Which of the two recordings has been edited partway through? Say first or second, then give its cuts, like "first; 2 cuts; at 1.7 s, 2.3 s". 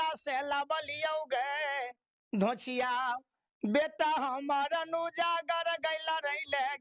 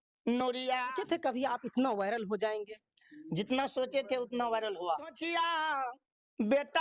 second; 2 cuts; at 1.0 s, 5.2 s